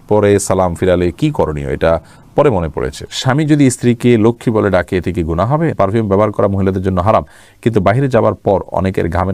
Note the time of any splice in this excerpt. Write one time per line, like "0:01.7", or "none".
0:03.1
0:05.7